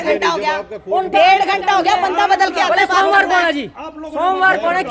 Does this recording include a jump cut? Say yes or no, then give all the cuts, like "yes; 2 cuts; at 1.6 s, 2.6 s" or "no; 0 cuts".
no; 0 cuts